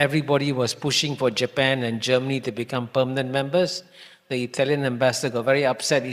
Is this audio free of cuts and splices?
yes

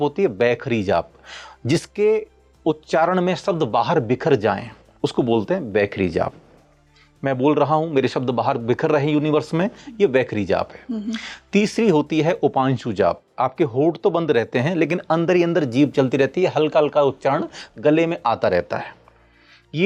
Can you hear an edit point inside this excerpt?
no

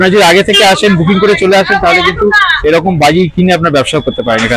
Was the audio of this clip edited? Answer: no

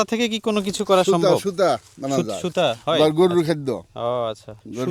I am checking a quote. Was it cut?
no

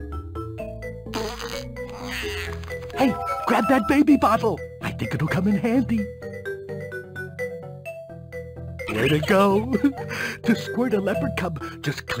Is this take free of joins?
no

